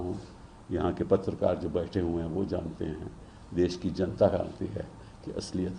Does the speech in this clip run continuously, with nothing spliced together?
yes; 0 cuts

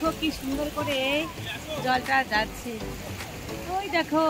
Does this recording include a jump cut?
no; 0 cuts

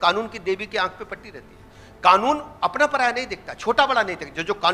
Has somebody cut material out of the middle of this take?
no; 0 cuts

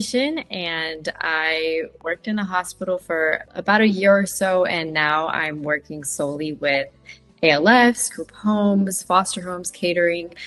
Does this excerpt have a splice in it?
no; 0 cuts

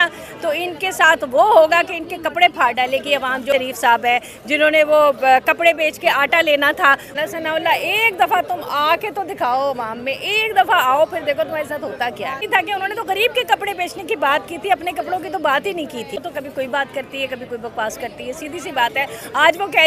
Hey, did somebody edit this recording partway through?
yes; 4 cuts; at 3.4 s, 7.1 s, 12.4 s, 16.2 s

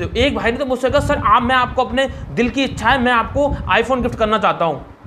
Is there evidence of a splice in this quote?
no; 0 cuts

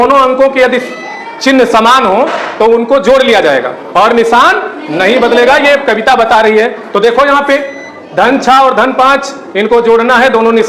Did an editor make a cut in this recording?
no; 0 cuts

